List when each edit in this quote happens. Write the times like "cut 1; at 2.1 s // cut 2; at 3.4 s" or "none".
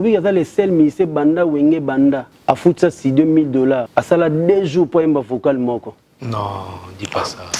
cut 1; at 2.3 s // cut 2; at 3.9 s